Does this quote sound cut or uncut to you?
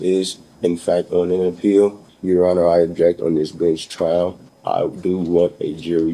cut